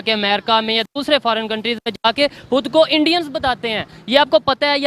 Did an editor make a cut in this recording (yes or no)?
no